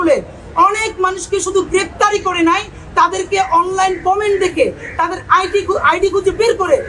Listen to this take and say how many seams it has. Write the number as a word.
zero